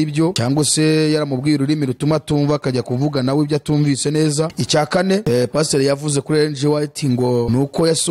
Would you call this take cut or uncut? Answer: uncut